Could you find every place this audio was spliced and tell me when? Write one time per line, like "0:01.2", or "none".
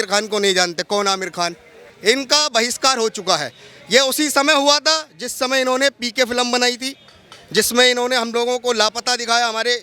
0:01.9